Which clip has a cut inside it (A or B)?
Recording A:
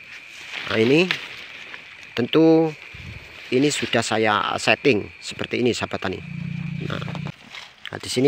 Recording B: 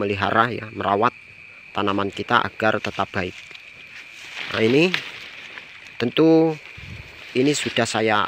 A